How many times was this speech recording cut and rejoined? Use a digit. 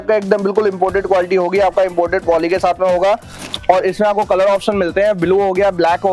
1